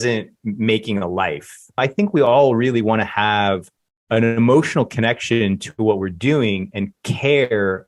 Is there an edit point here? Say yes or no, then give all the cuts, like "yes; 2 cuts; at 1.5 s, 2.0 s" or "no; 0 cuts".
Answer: yes; 1 cut; at 1.8 s